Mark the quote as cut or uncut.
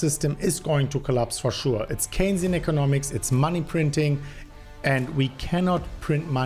uncut